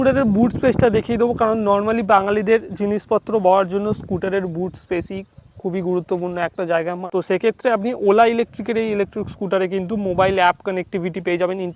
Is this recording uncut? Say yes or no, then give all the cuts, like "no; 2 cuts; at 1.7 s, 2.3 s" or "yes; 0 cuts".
no; 1 cut; at 7.0 s